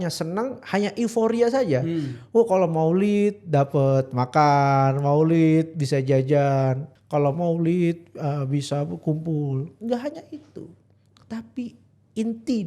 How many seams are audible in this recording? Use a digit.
1